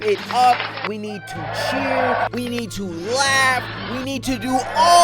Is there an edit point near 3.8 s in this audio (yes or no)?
no